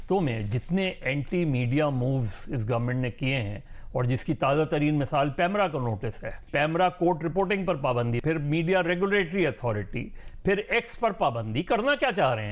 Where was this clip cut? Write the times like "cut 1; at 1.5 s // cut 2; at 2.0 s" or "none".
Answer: cut 1; at 6.5 s // cut 2; at 8.2 s